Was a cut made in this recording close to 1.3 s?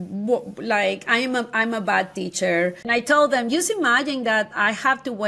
no; 1 cut; at 2.8 s

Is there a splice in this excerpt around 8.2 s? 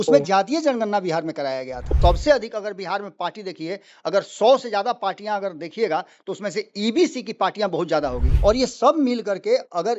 yes; 2 cuts; at 1.9 s, 8.2 s

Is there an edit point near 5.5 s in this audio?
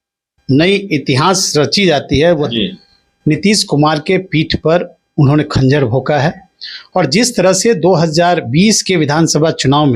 no; 1 cut; at 2.5 s

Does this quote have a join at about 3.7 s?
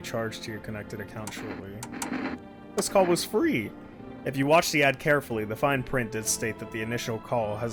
no; 0 cuts

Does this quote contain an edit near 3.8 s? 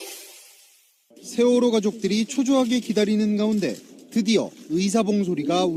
no; 0 cuts

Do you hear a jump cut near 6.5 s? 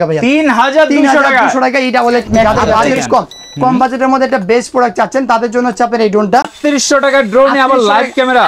yes; 2 cuts; at 2.4 s, 6.5 s

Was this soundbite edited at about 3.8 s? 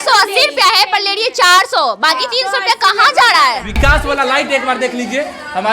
yes; 1 cut; at 3.8 s

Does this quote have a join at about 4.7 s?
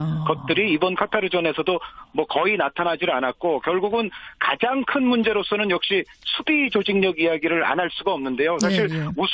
no; 0 cuts

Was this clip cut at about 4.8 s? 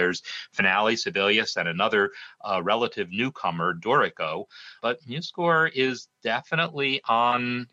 yes; 1 cut; at 4.8 s

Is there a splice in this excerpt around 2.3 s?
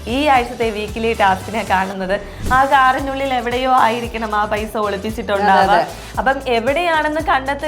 yes; 1 cut; at 2.3 s

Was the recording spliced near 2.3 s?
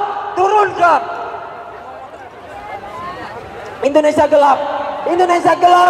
yes; 1 cut; at 2.3 s

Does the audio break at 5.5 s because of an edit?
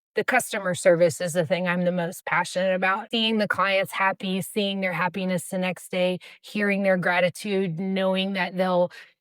no; 1 cut; at 3.0 s

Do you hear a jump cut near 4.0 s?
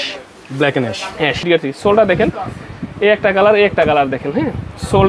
no; 1 cut; at 1.4 s

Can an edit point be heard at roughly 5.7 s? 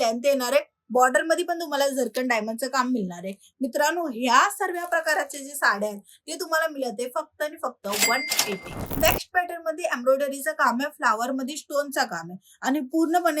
no; 1 cut; at 8.8 s

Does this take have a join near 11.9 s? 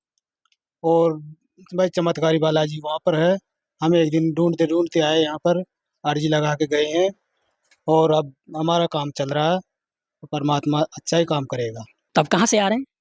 yes; 1 cut; at 11.9 s

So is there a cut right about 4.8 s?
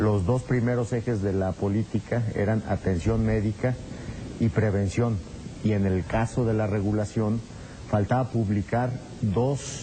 no; 1 cut; at 6.8 s

